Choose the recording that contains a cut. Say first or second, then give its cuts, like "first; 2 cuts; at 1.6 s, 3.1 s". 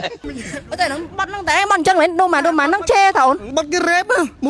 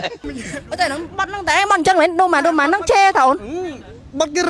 first; 1 cut; at 3.4 s